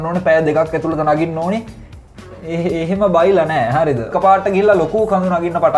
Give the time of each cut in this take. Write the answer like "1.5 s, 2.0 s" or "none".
4.1 s